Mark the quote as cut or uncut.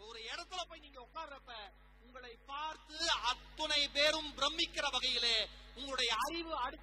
uncut